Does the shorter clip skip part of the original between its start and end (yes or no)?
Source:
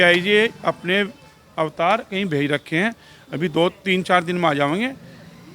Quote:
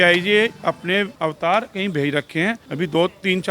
yes